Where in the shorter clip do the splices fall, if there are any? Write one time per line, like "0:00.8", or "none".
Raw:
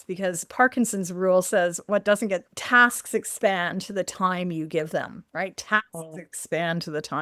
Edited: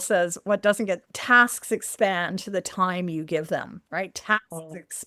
none

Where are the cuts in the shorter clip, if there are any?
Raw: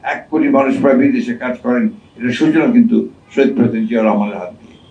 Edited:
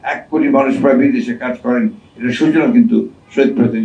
none

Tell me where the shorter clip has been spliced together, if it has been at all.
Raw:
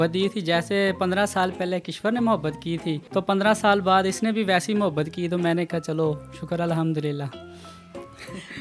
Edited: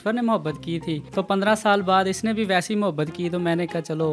none

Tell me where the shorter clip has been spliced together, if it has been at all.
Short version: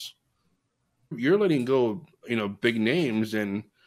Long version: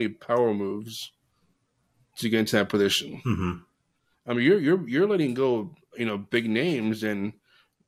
0:01.2

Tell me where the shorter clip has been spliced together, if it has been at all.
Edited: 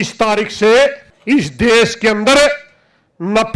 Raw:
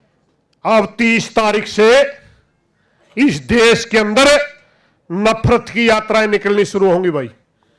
0:01.1

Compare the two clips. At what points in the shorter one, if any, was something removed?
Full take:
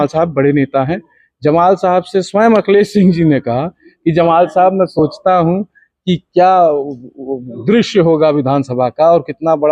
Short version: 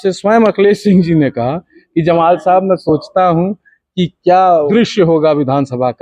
0:04.7

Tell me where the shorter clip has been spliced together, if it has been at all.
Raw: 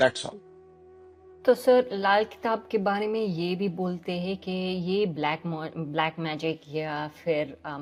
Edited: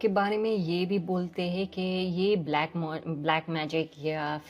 none

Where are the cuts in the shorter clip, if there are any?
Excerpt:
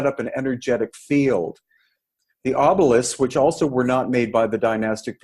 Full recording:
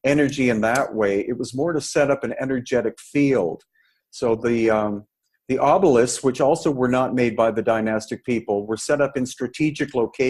0:02.0

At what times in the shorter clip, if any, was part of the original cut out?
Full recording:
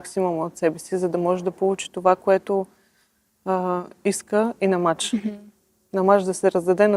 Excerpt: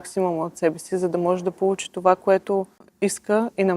0:02.9

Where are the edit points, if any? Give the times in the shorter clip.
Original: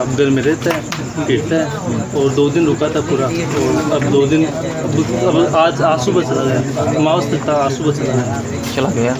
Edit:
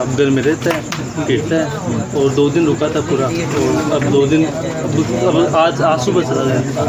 none

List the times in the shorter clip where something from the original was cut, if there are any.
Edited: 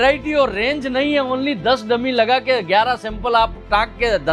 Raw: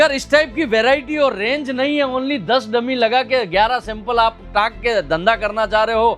none

